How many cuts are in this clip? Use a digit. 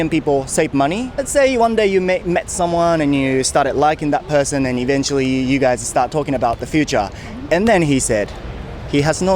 1